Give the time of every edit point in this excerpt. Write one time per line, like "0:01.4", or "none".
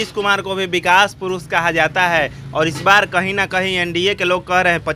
none